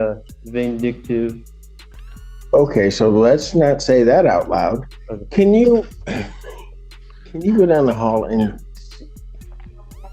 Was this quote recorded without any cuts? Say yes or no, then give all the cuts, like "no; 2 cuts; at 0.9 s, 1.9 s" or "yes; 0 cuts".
yes; 0 cuts